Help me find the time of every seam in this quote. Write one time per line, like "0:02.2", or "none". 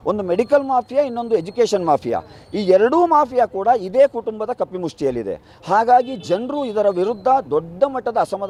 none